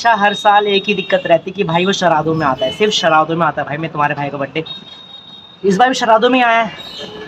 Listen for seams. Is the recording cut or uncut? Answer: uncut